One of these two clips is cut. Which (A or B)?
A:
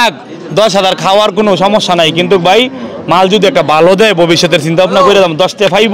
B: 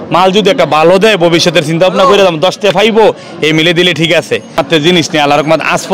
B